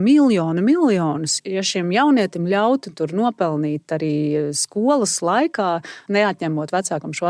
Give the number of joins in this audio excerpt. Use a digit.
2